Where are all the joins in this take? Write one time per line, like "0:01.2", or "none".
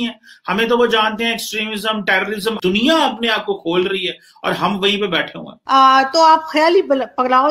0:02.6
0:05.5